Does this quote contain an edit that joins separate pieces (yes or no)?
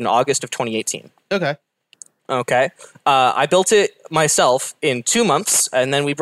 no